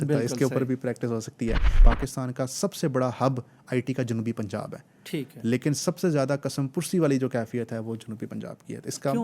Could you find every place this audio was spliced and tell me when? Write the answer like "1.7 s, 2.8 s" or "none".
1.8 s